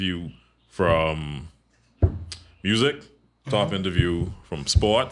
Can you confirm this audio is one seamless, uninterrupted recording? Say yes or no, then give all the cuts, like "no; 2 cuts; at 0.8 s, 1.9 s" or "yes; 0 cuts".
yes; 0 cuts